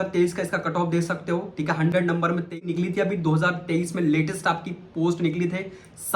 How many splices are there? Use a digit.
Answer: 1